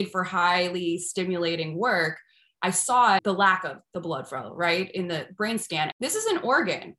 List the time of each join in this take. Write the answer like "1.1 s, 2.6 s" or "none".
3.2 s, 5.9 s